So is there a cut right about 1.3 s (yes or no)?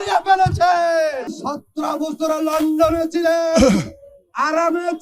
yes